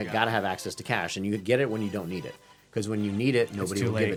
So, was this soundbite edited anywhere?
no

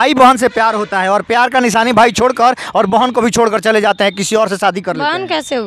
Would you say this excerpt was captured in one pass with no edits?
yes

